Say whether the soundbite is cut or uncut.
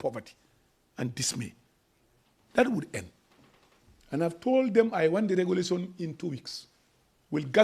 uncut